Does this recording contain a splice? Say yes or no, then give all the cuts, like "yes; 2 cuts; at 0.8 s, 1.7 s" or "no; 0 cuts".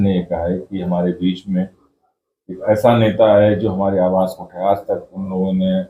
no; 0 cuts